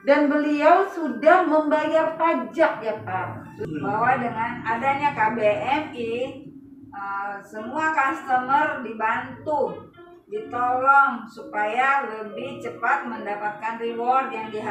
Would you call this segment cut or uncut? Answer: cut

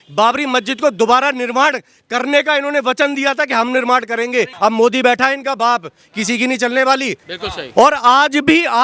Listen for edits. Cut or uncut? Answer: cut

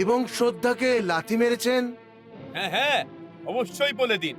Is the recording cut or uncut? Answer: uncut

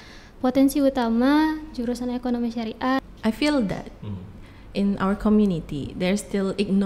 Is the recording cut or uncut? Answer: cut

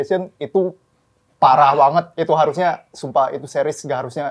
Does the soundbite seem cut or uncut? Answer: uncut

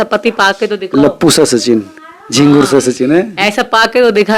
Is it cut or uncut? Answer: uncut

